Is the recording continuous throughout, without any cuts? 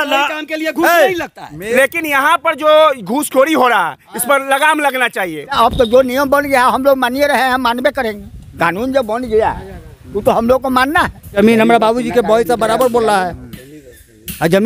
no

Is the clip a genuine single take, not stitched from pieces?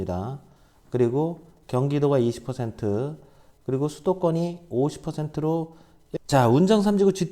no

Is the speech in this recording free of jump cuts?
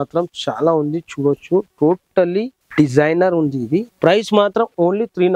no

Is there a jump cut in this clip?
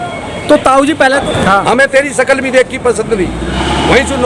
yes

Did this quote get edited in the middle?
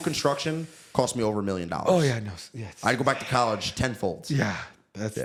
no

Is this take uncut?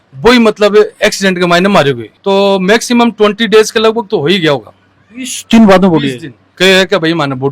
no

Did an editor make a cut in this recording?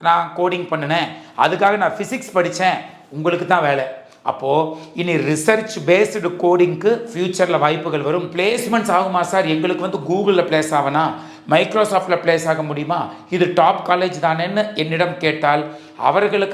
yes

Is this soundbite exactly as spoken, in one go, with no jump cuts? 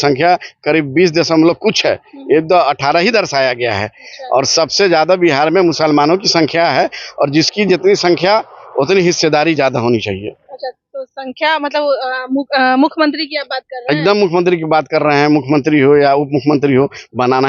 yes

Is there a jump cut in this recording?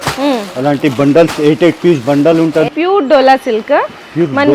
yes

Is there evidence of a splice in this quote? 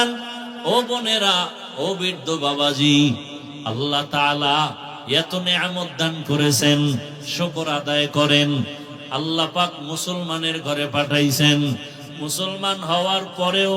no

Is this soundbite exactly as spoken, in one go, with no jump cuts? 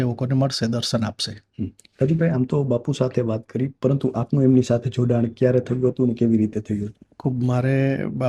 yes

